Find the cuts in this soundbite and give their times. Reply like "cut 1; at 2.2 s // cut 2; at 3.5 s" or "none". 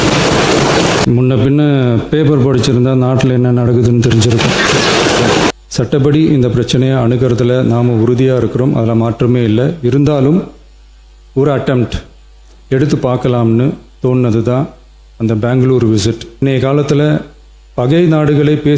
cut 1; at 1.0 s // cut 2; at 5.5 s // cut 3; at 16.4 s